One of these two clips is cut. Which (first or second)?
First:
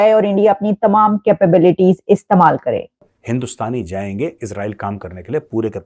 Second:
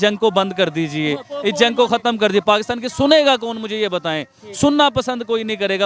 first